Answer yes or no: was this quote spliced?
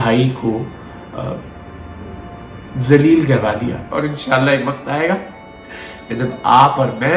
yes